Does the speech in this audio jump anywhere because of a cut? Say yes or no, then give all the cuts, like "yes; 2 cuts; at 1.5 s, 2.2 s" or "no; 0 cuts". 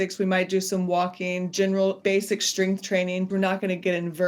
yes; 2 cuts; at 2.0 s, 3.3 s